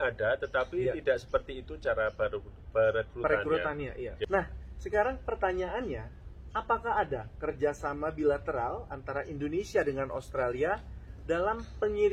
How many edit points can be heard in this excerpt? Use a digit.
1